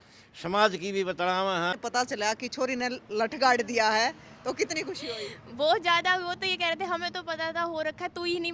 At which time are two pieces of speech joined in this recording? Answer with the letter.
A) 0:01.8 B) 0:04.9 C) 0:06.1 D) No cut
A